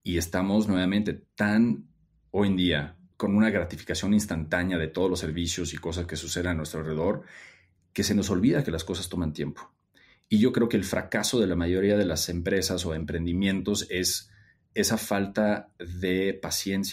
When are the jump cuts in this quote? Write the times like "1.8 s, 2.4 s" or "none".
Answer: 3.0 s